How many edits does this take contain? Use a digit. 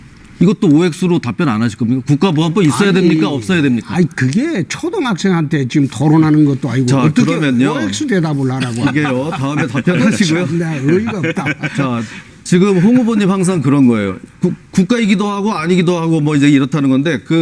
1